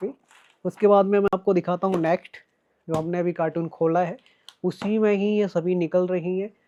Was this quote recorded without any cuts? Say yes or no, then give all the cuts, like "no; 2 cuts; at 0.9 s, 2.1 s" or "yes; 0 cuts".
yes; 0 cuts